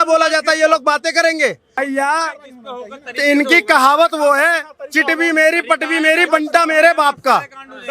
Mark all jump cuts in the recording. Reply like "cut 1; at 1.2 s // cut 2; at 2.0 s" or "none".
cut 1; at 1.8 s